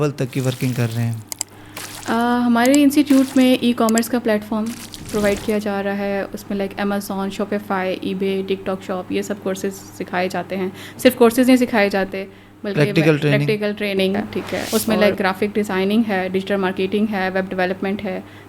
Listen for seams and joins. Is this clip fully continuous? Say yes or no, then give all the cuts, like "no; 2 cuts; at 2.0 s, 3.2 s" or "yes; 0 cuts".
no; 1 cut; at 14.6 s